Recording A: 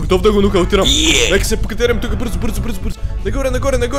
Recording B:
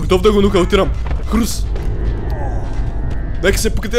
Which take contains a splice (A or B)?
A